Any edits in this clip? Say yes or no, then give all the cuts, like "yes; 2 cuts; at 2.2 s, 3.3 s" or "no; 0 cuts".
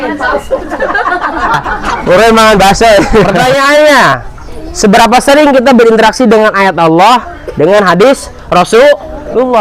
yes; 1 cut; at 3.3 s